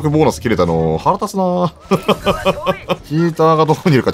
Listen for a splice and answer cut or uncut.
cut